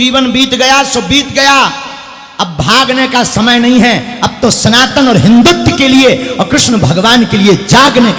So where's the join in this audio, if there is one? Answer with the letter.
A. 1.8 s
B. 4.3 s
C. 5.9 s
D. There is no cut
D